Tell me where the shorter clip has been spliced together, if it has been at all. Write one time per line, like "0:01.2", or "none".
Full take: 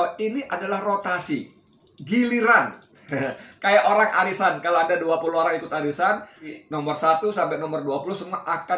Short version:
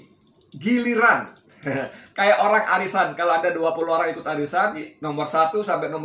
0:04.9